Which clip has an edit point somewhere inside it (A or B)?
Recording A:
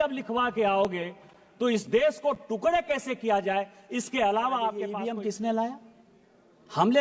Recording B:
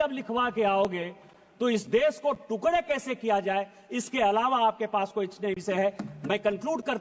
A